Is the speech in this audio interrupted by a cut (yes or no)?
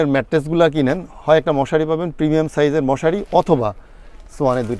no